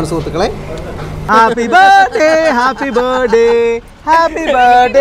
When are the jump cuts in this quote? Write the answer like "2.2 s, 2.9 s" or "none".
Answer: 1.3 s